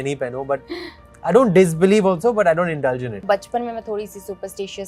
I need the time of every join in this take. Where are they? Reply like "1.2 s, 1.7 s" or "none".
3.2 s